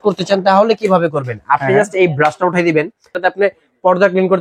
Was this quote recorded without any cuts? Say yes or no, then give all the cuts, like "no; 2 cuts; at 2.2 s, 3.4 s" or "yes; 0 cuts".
no; 1 cut; at 3.1 s